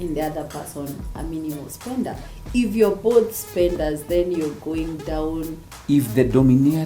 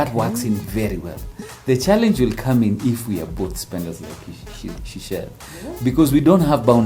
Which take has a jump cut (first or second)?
first